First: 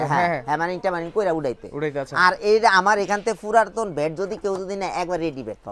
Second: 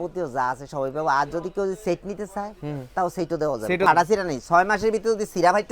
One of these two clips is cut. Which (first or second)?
second